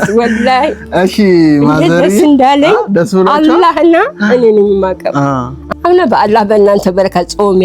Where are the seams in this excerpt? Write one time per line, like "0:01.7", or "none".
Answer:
0:05.5